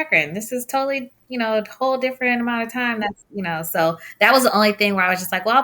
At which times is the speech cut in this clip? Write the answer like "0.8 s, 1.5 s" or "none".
none